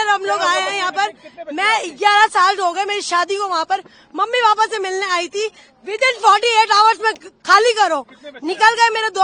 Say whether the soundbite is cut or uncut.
uncut